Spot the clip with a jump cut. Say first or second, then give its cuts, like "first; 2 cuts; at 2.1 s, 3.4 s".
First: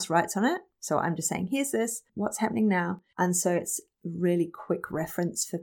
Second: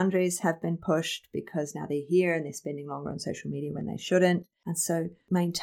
first; 2 cuts; at 2.0 s, 3.0 s